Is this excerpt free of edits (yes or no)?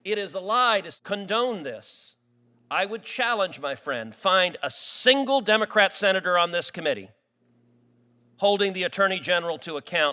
no